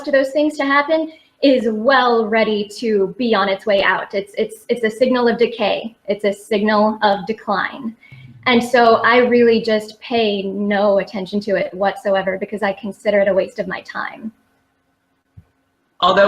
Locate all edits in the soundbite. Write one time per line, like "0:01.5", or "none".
0:12.1